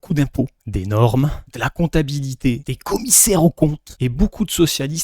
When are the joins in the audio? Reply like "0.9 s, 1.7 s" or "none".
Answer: 3.9 s